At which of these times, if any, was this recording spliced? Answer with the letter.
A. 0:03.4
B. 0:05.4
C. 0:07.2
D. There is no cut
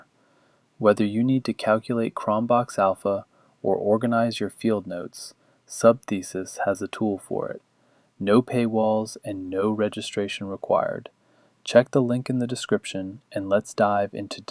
D